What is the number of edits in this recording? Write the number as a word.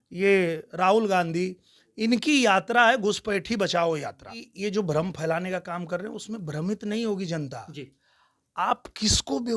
one